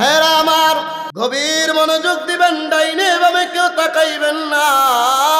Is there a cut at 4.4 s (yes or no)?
no